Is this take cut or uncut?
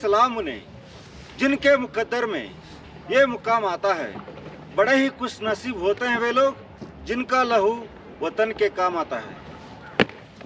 uncut